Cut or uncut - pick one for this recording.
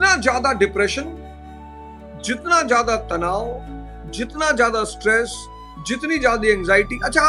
uncut